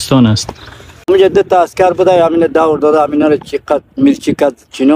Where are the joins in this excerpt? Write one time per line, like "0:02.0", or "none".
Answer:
0:01.1